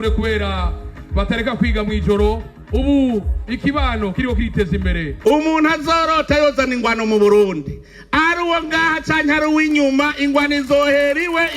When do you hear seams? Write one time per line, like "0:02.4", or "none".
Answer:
0:05.1